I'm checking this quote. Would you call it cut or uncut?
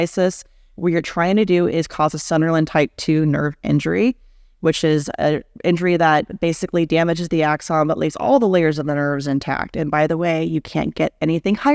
uncut